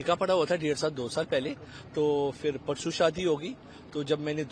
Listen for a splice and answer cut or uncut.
uncut